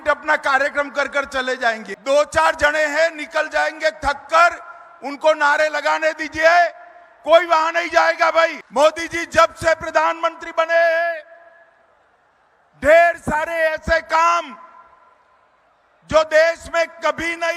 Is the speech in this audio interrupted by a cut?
yes; 2 cuts; at 1.9 s, 8.6 s

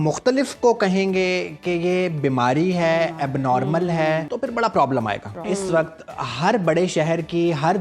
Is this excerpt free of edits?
no; 2 cuts; at 4.3 s, 5.4 s

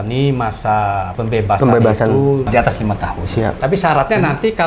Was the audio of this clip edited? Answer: yes; 3 cuts; at 1.1 s, 2.5 s, 3.6 s

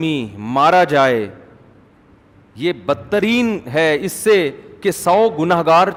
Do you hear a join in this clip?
no; 0 cuts

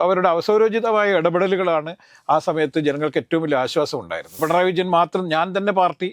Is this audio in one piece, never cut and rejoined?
no; 1 cut; at 4.4 s

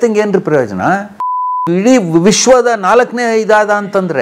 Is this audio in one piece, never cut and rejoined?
yes; 0 cuts

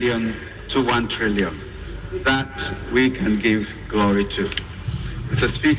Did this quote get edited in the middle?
no; 0 cuts

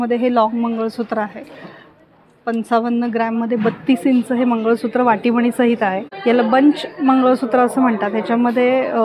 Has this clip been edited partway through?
yes; 1 cut; at 6.1 s

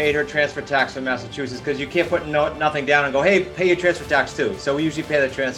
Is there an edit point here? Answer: no; 0 cuts

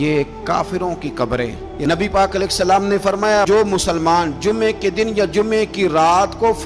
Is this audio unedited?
no; 1 cut; at 1.7 s

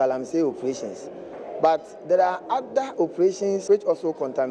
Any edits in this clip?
yes; 1 cut; at 3.6 s

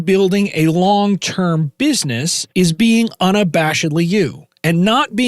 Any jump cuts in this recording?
yes; 1 cut; at 2.3 s

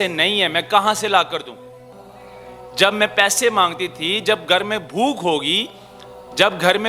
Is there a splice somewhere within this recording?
no; 0 cuts

